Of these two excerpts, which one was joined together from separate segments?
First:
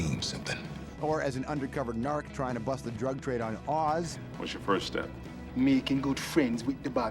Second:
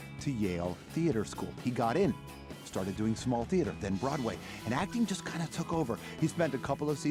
first; 1 cut; at 6.0 s

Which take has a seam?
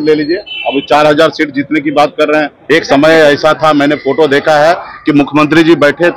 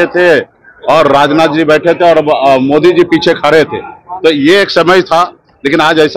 first; 1 cut; at 2.6 s

